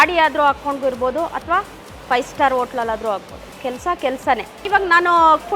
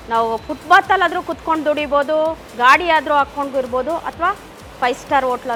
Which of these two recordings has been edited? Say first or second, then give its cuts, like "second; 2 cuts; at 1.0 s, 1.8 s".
first; 1 cut; at 4.6 s